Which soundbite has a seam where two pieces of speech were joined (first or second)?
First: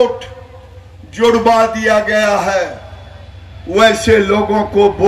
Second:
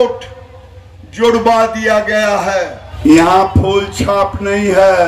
second